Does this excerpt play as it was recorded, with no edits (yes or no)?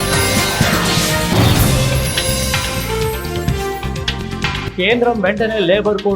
no